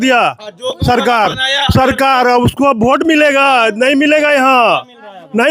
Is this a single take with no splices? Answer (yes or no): yes